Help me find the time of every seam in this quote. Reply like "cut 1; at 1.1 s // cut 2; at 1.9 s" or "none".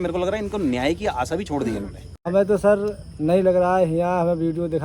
cut 1; at 2.2 s